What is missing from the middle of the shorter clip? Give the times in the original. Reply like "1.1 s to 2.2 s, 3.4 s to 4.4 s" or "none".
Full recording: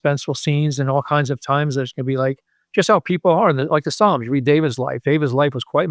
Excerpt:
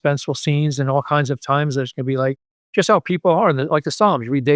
none